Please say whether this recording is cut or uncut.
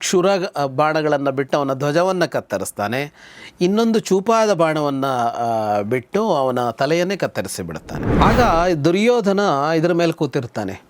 cut